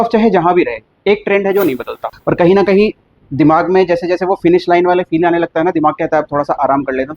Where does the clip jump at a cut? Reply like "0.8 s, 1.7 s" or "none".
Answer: 2.1 s